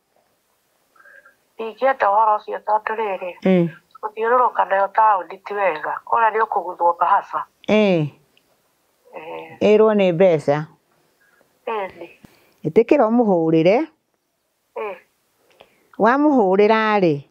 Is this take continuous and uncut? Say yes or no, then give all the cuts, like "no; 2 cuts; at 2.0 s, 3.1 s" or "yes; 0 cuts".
no; 1 cut; at 12.2 s